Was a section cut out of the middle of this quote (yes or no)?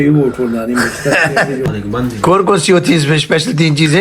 yes